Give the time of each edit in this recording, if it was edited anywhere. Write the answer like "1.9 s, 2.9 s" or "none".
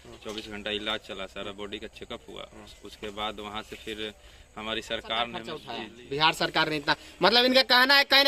5.8 s